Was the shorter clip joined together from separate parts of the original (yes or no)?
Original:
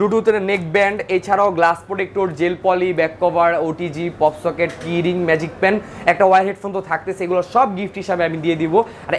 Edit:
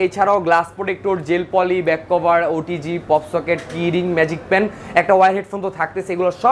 no